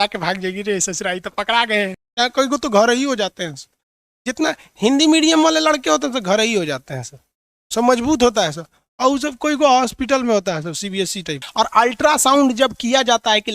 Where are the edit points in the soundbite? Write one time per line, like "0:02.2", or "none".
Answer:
0:02.0
0:11.4